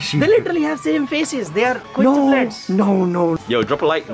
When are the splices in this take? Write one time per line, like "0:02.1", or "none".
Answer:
0:01.8
0:03.4